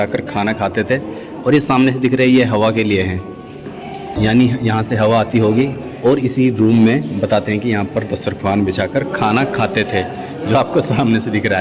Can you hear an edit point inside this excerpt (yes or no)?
no